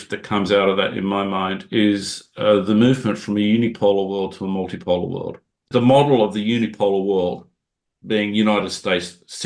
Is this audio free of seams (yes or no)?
no